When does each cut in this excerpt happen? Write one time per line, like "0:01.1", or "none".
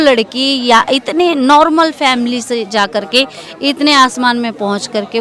none